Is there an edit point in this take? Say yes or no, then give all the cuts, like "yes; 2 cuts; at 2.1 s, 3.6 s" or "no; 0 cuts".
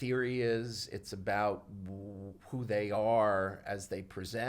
no; 0 cuts